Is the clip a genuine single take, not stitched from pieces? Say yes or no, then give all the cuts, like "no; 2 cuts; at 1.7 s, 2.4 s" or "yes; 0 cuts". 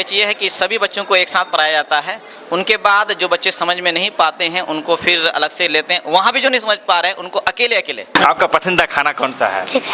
no; 1 cut; at 8.1 s